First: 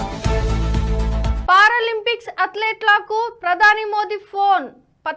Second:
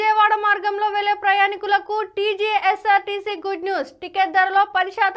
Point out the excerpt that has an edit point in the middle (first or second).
first